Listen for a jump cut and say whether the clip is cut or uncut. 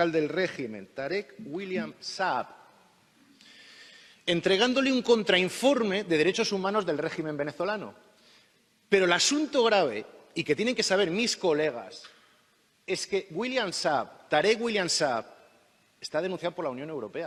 uncut